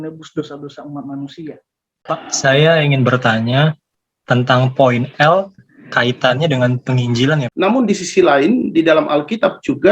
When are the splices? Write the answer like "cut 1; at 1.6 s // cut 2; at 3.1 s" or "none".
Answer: cut 1; at 2.0 s // cut 2; at 7.5 s